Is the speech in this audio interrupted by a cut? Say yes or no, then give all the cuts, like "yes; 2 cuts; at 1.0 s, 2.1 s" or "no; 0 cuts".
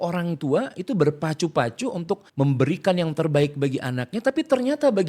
yes; 1 cut; at 2.3 s